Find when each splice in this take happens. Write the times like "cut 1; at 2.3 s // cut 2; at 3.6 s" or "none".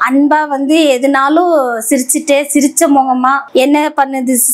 cut 1; at 3.4 s